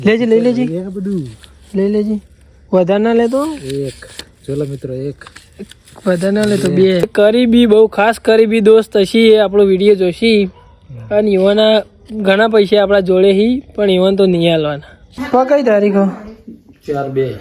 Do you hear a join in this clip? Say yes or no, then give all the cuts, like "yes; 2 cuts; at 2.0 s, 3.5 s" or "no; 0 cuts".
yes; 2 cuts; at 7.1 s, 15.2 s